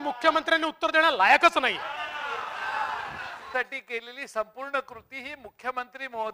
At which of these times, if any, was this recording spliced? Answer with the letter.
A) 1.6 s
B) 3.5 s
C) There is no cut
B